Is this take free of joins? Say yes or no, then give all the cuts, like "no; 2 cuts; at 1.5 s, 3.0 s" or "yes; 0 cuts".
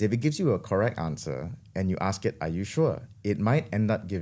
yes; 0 cuts